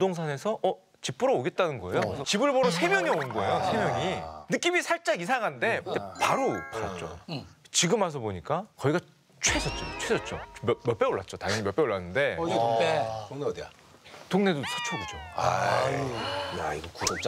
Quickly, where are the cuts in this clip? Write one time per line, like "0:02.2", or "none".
0:02.2
0:06.0